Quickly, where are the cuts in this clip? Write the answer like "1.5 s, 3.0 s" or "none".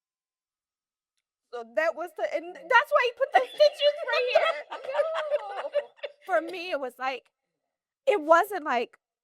6.1 s